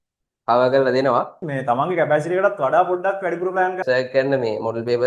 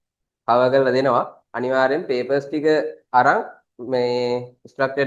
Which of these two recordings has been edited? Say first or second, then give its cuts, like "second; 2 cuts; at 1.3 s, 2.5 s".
first; 2 cuts; at 1.4 s, 3.8 s